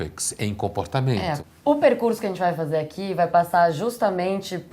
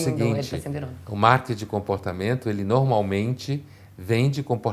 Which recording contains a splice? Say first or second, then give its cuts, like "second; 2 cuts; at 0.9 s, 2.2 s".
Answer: first; 1 cut; at 1.5 s